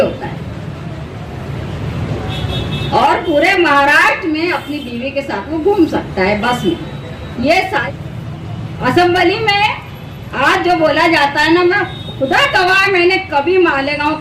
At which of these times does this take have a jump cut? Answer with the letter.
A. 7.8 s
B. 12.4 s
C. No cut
A